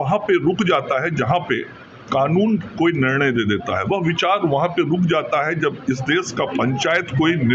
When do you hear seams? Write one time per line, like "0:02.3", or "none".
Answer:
none